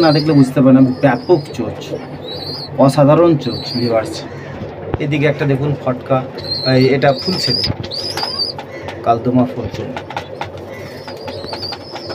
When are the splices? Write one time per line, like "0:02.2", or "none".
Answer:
none

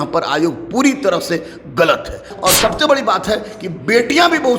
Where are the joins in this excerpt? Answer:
0:02.3

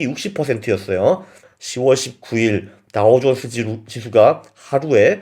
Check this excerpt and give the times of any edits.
0:01.4

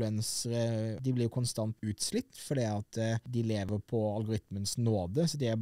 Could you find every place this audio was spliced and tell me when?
0:01.0
0:01.8
0:03.7

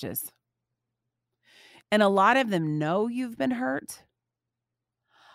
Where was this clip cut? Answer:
0:01.8

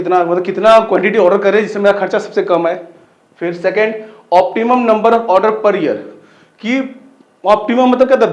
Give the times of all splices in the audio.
none

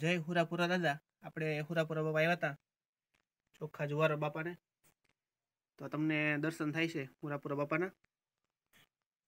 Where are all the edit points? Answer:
none

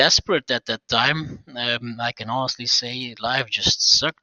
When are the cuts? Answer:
none

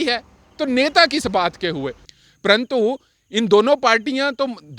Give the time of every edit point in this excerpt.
0:02.0

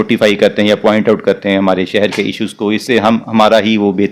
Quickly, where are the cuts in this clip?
none

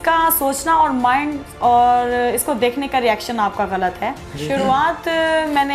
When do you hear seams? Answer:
0:04.3

